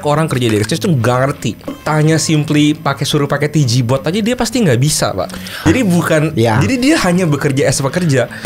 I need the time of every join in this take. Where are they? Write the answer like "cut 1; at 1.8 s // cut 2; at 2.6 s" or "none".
cut 1; at 1.8 s // cut 2; at 5.6 s